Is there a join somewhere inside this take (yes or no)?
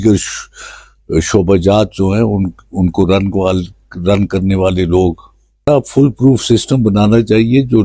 yes